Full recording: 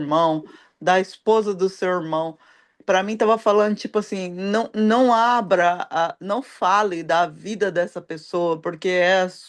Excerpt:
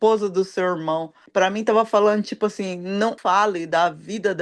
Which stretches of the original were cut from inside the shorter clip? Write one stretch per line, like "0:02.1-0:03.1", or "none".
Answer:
0:02.4-0:02.7
0:04.7-0:06.5